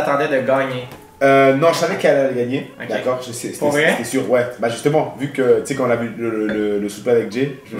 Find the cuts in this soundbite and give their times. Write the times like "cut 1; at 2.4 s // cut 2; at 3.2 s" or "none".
none